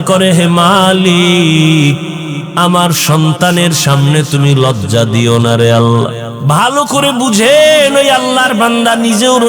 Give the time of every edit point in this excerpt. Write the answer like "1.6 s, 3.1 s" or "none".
6.3 s